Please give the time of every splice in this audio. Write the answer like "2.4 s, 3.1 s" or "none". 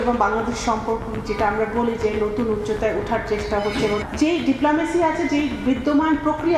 4.0 s